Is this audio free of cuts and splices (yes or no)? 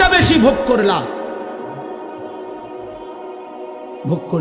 no